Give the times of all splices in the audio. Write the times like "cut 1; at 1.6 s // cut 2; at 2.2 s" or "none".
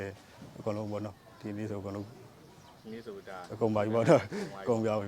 none